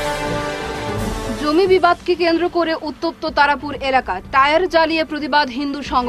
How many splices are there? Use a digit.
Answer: 0